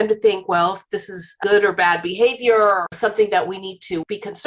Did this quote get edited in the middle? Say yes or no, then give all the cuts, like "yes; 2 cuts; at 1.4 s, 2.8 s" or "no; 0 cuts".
yes; 2 cuts; at 1.4 s, 2.9 s